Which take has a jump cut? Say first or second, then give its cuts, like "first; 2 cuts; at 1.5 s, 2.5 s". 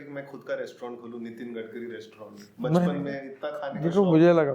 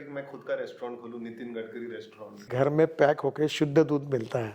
second; 1 cut; at 2.5 s